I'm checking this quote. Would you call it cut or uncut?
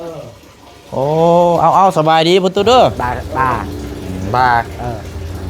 cut